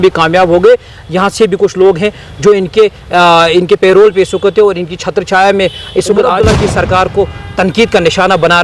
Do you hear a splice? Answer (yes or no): yes